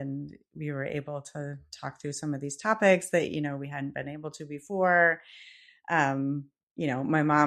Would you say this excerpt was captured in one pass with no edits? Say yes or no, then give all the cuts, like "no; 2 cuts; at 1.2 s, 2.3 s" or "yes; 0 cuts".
yes; 0 cuts